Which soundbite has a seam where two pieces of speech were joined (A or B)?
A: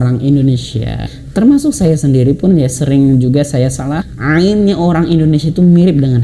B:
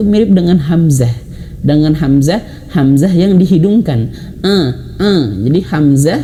A